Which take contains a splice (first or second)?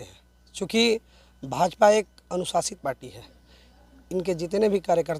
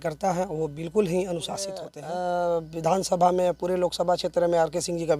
second